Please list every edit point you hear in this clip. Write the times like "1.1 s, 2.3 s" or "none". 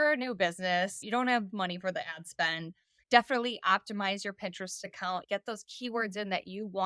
1.0 s